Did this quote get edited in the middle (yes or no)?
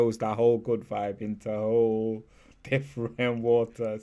no